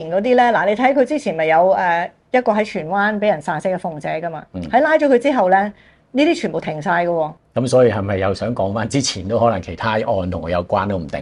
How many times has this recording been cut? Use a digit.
1